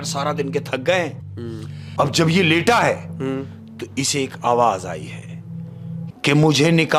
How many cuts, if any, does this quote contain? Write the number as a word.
two